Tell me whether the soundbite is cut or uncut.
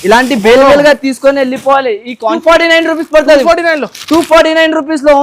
cut